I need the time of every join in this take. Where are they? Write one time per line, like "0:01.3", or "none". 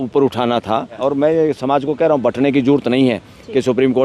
0:01.0

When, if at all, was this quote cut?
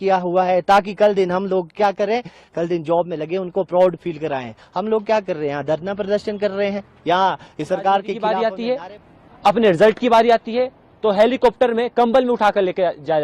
0:08.2

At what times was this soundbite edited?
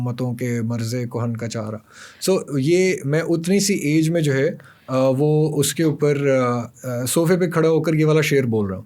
none

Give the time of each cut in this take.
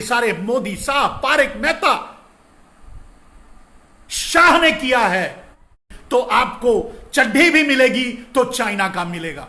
0:05.9

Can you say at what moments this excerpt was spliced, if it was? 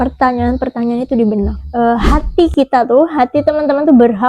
0:02.0

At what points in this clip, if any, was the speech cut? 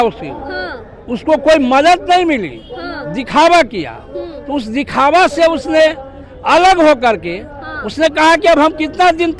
none

